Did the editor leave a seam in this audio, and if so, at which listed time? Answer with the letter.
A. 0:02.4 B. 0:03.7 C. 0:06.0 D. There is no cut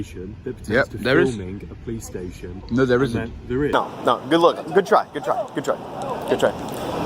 B